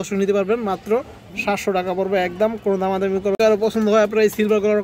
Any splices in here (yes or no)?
yes